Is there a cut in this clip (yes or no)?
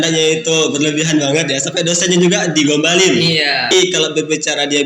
yes